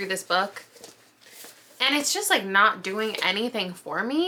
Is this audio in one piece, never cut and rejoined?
yes; 0 cuts

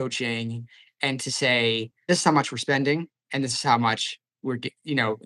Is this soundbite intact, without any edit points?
no; 1 cut; at 2.0 s

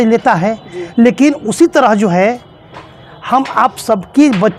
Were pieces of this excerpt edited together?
no; 0 cuts

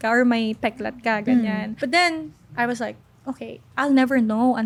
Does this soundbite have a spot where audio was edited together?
no; 0 cuts

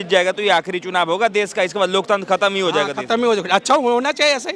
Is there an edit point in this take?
no; 0 cuts

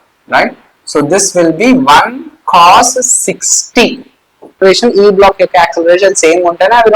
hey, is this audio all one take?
no; 1 cut; at 4.6 s

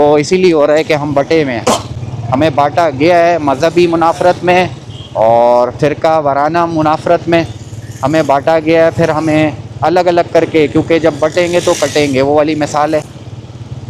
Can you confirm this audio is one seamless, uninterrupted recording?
yes; 0 cuts

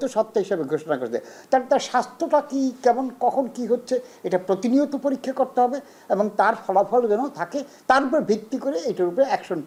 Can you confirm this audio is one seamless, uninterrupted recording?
yes; 0 cuts

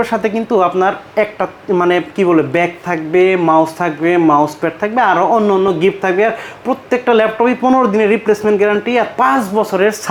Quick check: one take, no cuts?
yes; 0 cuts

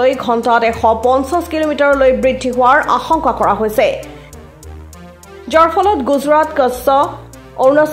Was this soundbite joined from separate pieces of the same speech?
yes; 2 cuts; at 4.0 s, 5.5 s

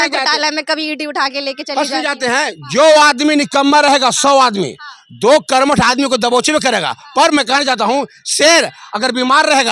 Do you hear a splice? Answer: no; 0 cuts

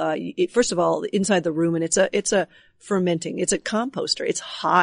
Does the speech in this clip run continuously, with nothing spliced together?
no; 1 cut; at 3.7 s

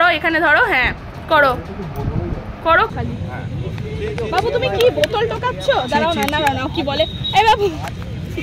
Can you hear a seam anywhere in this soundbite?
yes; 1 cut; at 2.9 s

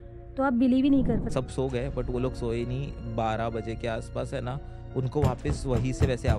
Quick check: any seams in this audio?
yes; 1 cut; at 1.3 s

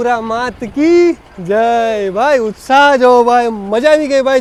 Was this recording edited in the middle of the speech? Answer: no; 0 cuts

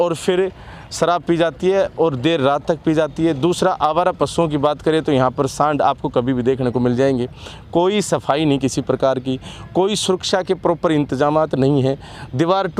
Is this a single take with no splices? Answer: yes; 0 cuts

